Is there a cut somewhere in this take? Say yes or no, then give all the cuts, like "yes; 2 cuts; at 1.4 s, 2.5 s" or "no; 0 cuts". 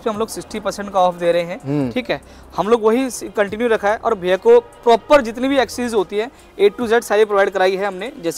no; 0 cuts